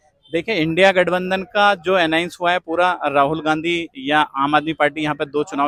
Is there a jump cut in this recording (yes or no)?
no